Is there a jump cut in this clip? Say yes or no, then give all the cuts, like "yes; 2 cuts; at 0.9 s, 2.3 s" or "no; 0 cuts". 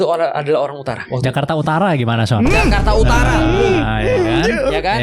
yes; 1 cut; at 1.0 s